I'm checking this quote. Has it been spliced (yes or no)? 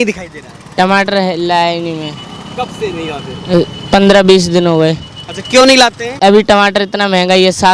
yes